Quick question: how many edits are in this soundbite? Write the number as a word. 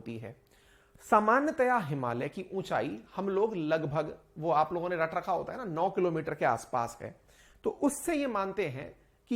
zero